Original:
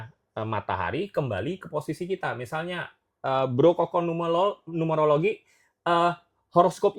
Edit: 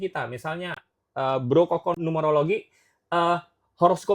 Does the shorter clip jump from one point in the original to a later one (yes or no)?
yes